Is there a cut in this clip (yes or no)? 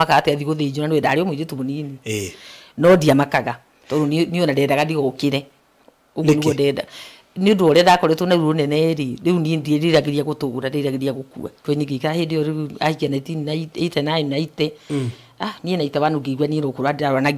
yes